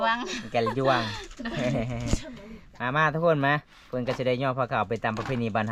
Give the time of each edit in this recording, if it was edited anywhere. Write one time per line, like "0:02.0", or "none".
none